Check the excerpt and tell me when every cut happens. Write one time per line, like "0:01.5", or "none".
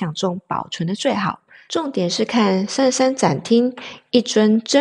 0:01.5